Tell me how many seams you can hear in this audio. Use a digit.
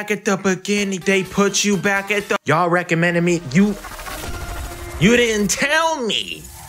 1